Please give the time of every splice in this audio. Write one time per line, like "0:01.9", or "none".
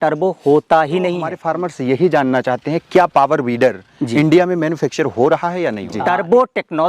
0:01.3
0:05.9